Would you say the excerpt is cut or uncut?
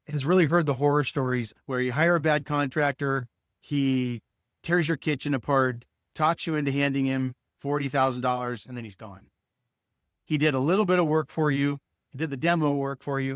cut